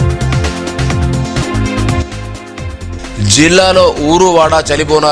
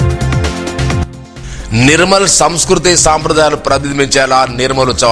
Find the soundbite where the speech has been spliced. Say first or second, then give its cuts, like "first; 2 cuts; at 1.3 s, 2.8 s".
second; 1 cut; at 1.0 s